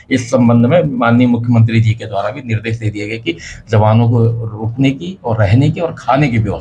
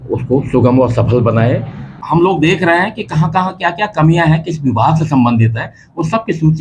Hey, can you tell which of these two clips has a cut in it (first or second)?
second